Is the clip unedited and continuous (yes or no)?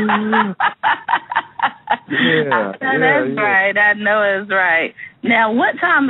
no